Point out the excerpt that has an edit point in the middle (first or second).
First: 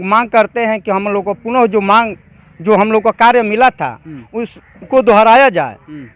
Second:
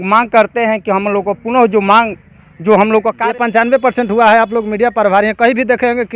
second